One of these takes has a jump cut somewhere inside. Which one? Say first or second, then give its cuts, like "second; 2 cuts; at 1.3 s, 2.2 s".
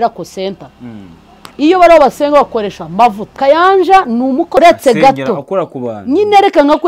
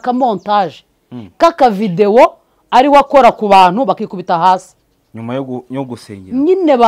first; 2 cuts; at 3.3 s, 4.6 s